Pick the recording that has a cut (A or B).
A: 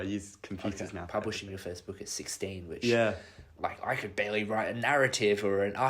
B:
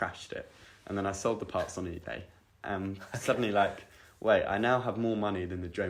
A